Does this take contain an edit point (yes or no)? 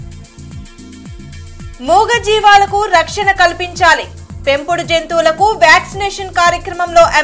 no